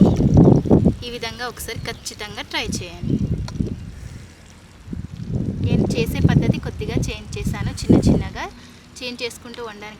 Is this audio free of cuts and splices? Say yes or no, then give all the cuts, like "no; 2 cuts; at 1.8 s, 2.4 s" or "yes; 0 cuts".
yes; 0 cuts